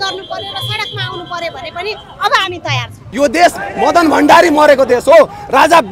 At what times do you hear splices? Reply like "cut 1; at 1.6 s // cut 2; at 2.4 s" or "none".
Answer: cut 1; at 3.1 s